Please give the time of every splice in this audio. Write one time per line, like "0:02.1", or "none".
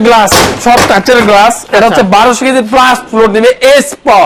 none